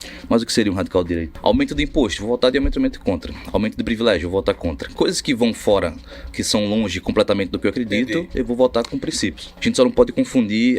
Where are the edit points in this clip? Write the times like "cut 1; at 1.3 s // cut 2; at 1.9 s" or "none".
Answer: cut 1; at 1.3 s // cut 2; at 9.5 s